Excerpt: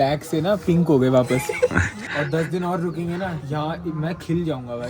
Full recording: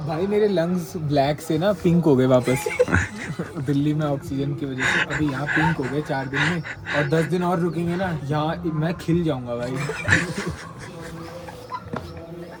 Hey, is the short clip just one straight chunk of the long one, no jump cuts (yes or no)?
no